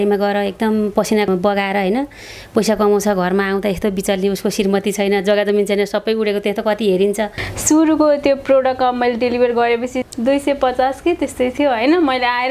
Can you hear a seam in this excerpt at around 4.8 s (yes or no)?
no